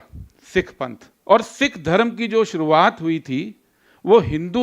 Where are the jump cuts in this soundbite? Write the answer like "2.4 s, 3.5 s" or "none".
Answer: 1.1 s